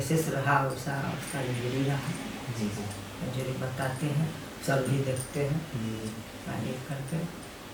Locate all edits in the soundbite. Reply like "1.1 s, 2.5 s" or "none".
none